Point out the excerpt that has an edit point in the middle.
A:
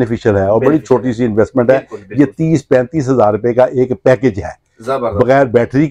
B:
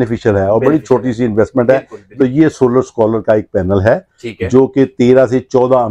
B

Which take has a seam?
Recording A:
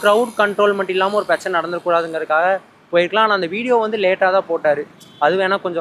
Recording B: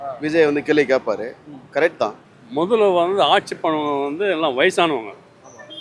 B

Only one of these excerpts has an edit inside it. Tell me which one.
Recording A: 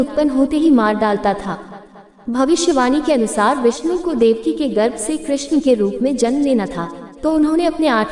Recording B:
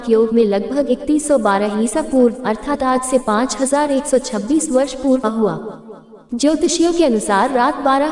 B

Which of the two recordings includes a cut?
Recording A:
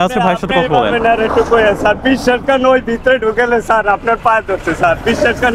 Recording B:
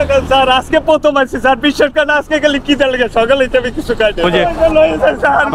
B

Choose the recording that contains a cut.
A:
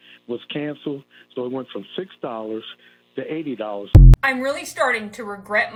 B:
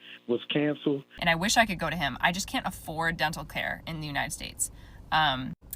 B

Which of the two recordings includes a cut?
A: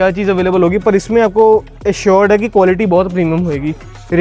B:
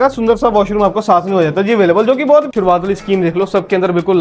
B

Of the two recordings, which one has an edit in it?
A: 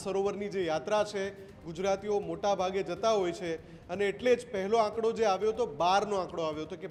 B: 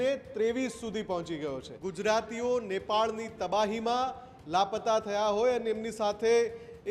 B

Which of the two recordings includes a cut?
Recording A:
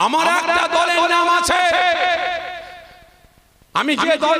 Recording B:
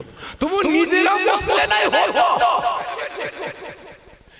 B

